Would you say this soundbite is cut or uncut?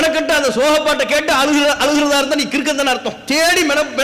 uncut